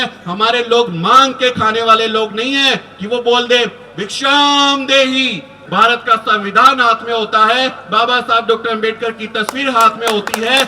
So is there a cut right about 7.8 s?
no; 1 cut; at 5.6 s

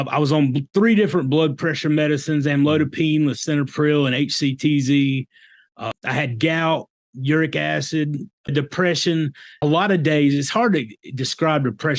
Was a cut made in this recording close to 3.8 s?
no; 3 cuts; at 5.9 s, 8.5 s, 9.6 s

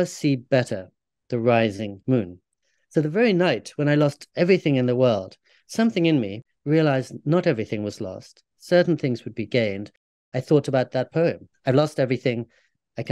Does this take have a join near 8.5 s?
no; 3 cuts; at 6.4 s, 10.2 s, 11.5 s

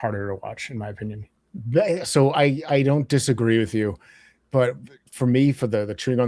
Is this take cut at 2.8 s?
no; 1 cut; at 1.3 s

